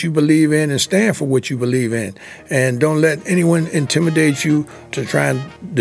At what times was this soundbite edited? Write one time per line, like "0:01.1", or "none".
none